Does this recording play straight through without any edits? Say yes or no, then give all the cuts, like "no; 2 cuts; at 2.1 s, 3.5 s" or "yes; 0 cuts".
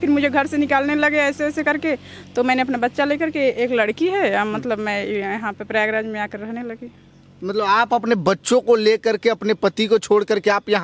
yes; 0 cuts